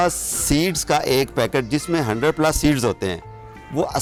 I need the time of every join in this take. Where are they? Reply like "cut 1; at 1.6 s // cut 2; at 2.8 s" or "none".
none